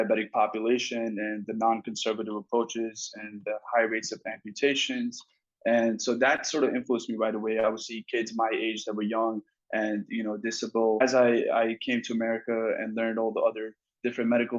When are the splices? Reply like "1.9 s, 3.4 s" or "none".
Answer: 11.0 s

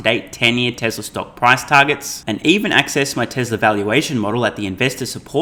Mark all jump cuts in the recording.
none

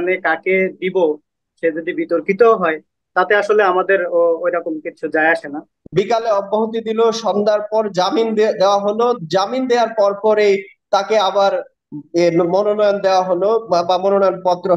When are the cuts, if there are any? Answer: 5.7 s

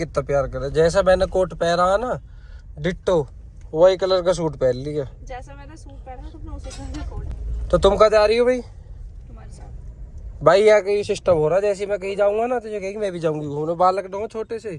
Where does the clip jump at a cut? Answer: none

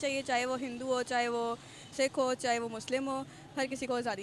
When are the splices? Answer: none

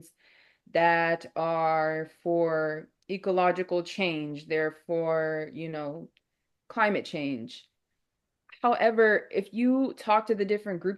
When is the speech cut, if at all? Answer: none

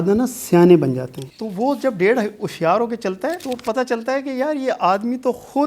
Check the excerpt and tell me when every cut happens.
1.1 s

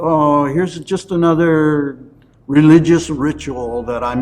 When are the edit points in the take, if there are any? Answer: none

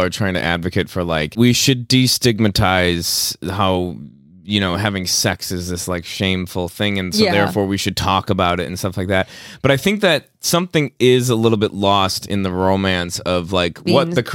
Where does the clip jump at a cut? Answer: 1.3 s

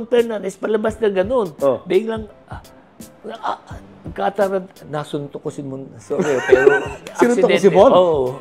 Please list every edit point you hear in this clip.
none

